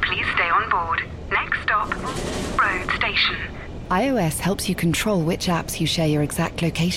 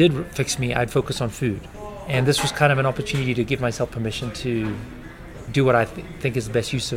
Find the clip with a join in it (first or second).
second